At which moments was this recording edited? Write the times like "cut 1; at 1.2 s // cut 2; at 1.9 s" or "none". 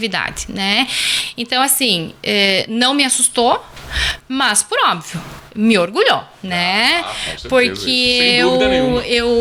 none